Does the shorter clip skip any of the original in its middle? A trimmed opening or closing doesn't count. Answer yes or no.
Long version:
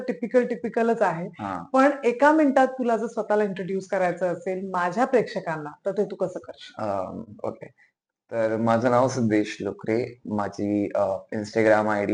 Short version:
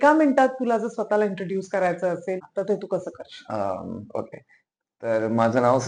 yes